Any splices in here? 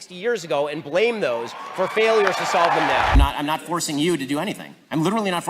yes; 1 cut; at 3.1 s

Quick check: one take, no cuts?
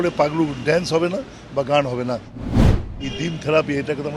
no; 1 cut; at 2.7 s

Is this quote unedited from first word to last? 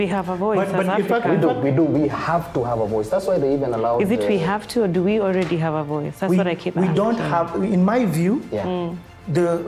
yes; 0 cuts

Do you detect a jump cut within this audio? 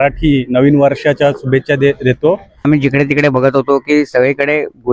yes; 1 cut; at 2.6 s

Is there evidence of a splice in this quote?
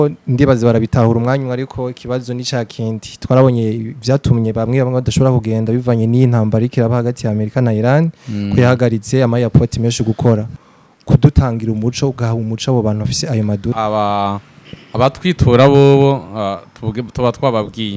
yes; 2 cuts; at 10.6 s, 13.7 s

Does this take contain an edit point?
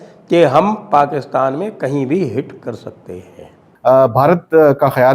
yes; 1 cut; at 3.6 s

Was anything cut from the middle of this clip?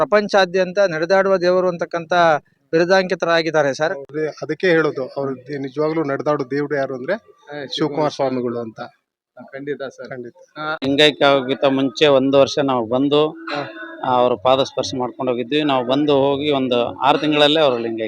yes; 2 cuts; at 4.1 s, 10.8 s

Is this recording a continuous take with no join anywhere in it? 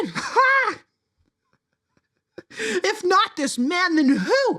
yes; 0 cuts

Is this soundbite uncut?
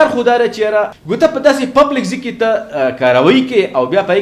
no; 1 cut; at 1.0 s

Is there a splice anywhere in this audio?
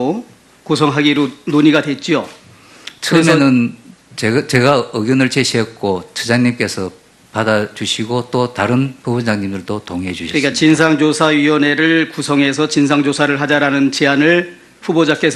yes; 1 cut; at 5.5 s

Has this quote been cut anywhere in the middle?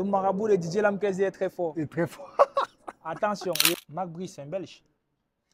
yes; 1 cut; at 3.7 s

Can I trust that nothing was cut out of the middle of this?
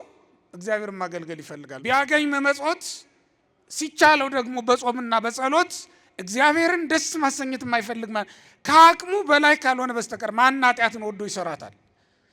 no; 1 cut; at 1.6 s

